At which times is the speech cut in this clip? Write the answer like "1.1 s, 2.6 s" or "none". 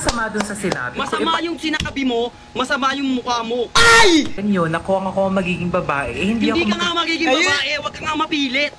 4.3 s